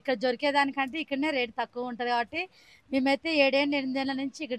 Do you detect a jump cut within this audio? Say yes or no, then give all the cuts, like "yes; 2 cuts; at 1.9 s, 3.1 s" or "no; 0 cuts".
no; 0 cuts